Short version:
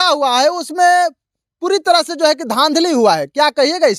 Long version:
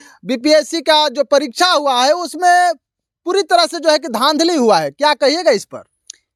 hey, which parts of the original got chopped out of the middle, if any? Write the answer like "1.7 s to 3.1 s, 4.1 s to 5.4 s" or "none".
none